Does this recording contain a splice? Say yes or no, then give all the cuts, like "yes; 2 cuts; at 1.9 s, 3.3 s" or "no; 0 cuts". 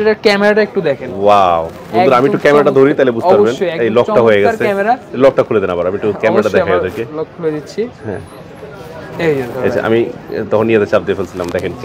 no; 0 cuts